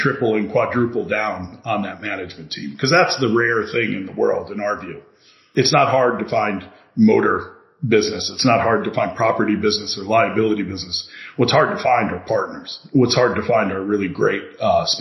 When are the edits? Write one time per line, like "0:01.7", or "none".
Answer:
0:05.4